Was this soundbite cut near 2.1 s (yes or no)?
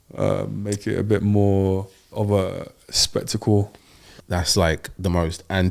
yes